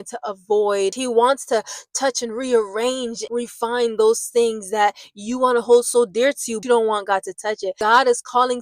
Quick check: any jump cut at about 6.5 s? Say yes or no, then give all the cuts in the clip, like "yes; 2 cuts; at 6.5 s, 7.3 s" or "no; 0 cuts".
yes; 4 cuts; at 1.0 s, 3.2 s, 6.5 s, 7.8 s